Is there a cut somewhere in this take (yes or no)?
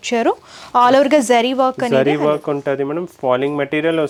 no